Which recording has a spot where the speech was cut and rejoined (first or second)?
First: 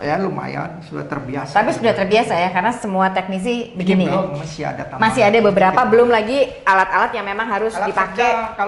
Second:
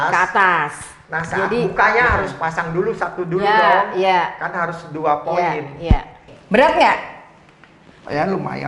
second